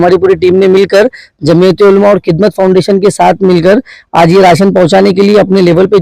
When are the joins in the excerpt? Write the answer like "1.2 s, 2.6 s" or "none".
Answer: none